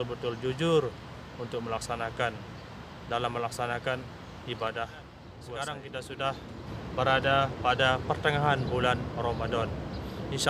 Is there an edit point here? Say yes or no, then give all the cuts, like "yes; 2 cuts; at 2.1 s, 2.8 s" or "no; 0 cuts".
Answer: yes; 1 cut; at 5.3 s